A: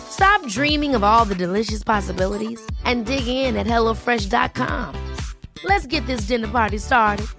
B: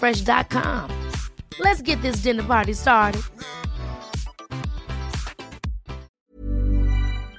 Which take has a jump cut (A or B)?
B